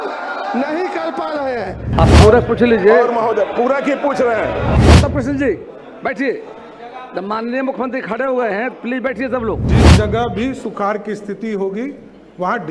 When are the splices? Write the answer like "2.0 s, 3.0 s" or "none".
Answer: 1.8 s, 4.8 s, 9.7 s